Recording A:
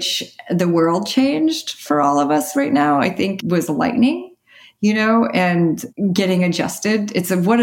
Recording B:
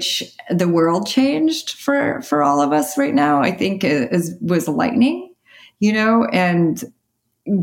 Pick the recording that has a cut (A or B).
A